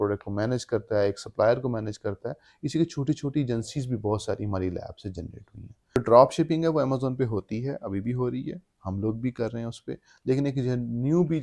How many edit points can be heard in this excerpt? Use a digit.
1